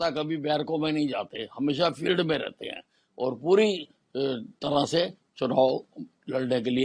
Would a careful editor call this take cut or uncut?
uncut